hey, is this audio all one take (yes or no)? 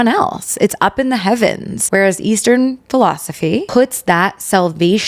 no